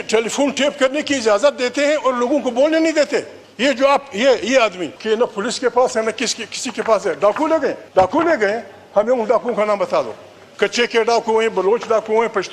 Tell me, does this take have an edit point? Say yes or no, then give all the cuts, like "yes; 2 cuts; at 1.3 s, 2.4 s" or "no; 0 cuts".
yes; 3 cuts; at 3.4 s, 4.9 s, 7.8 s